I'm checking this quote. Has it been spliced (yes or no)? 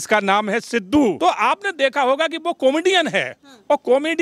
yes